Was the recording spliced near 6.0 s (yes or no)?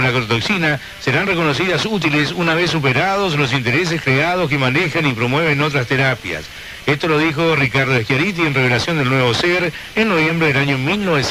no